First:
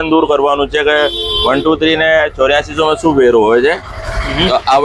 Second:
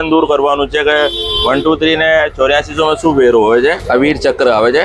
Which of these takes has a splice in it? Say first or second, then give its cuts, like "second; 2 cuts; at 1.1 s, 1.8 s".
second; 1 cut; at 3.8 s